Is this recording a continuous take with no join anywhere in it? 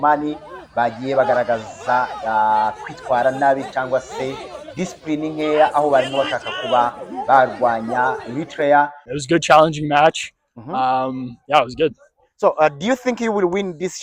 no; 1 cut; at 9.1 s

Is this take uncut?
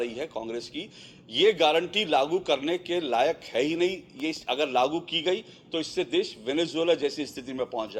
yes; 0 cuts

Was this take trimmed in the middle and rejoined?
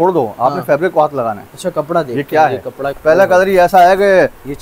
yes; 1 cut; at 2.9 s

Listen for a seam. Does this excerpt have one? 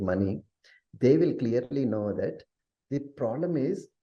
no; 0 cuts

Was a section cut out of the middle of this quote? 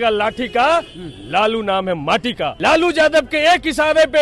yes; 1 cut; at 2.5 s

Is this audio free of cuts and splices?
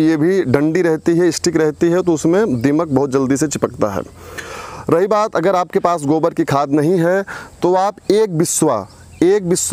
yes; 0 cuts

